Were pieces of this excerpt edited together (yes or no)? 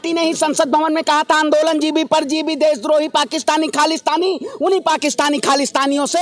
no